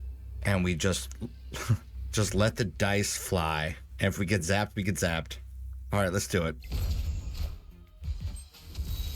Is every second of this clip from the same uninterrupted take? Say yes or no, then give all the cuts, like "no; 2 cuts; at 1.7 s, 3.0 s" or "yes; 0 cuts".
no; 3 cuts; at 2.0 s, 3.8 s, 6.6 s